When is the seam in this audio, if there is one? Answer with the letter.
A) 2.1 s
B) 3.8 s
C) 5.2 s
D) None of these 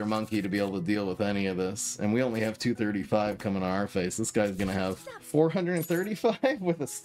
C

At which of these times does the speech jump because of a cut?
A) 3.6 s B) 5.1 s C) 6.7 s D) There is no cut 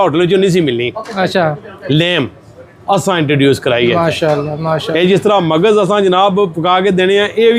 D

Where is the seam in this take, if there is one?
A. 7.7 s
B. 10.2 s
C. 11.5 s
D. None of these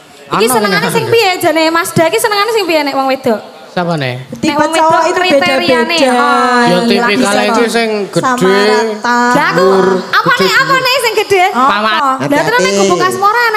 C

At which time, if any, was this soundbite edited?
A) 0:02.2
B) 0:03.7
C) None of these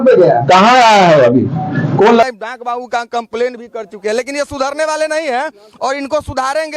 A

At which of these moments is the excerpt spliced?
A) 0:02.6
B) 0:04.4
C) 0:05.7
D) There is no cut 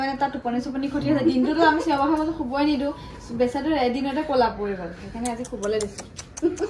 D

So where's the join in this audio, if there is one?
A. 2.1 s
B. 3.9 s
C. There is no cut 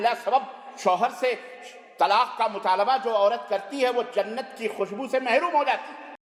C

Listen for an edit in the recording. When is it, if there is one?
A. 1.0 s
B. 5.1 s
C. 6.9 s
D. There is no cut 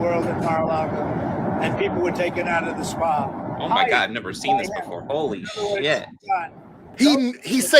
C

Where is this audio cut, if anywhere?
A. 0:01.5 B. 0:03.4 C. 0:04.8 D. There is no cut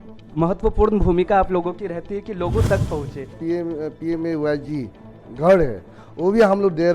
B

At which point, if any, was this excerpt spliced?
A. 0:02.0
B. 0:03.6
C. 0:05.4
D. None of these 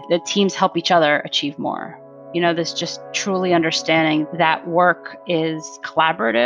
D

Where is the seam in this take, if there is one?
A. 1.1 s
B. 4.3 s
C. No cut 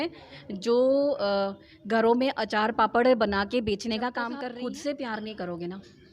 B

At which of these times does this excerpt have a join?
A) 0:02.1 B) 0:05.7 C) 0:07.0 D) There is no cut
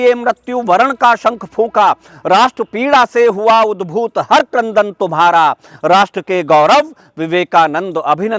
D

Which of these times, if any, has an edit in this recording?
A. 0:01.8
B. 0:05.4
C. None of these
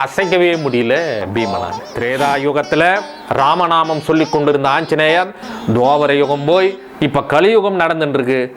A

